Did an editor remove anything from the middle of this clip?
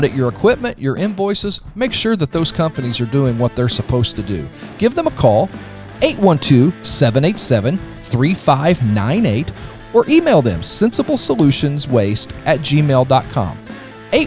no; 0 cuts

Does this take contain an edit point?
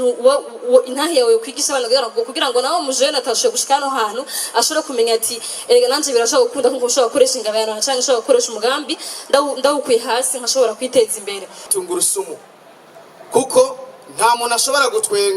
yes; 1 cut; at 11.7 s

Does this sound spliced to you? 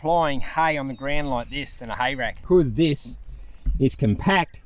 yes; 1 cut; at 2.4 s

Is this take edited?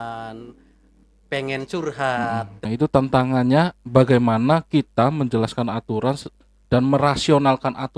yes; 1 cut; at 2.6 s

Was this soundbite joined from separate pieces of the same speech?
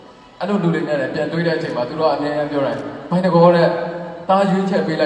no; 0 cuts

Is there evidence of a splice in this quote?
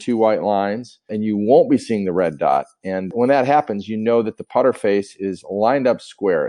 yes; 2 cuts; at 1.0 s, 3.1 s

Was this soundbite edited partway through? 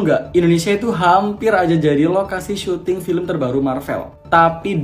no; 0 cuts

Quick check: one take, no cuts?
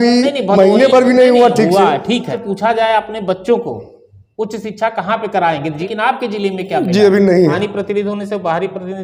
no; 3 cuts; at 2.3 s, 5.8 s, 7.5 s

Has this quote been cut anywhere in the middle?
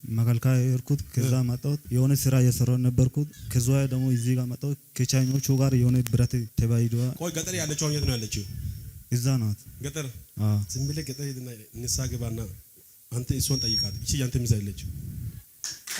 yes; 3 cuts; at 1.8 s, 3.4 s, 6.5 s

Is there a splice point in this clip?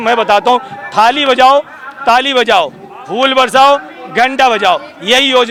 no; 0 cuts

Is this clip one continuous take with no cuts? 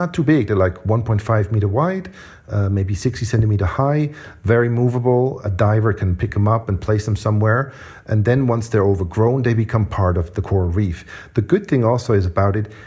no; 1 cut; at 7.9 s

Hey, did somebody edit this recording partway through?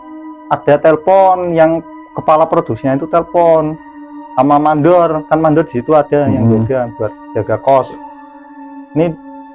no; 0 cuts

